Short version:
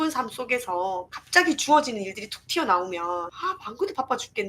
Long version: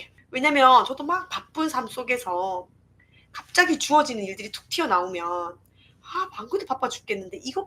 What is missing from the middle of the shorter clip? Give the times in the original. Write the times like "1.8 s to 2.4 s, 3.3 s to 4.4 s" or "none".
2.7 s to 3.4 s, 5.5 s to 6.0 s